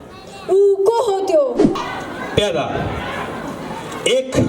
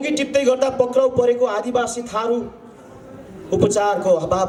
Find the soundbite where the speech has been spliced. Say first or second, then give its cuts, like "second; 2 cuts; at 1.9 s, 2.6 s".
first; 1 cut; at 1.8 s